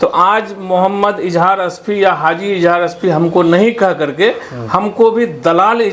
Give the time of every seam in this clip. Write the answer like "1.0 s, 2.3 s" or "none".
none